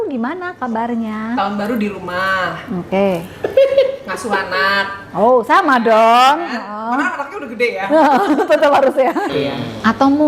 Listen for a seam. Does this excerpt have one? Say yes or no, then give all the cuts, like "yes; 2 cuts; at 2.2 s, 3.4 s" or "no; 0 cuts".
yes; 1 cut; at 9.3 s